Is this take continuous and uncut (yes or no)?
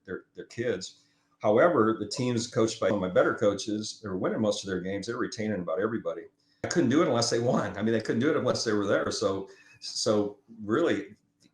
no